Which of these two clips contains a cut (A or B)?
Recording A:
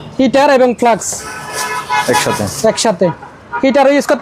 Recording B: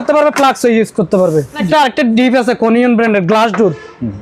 B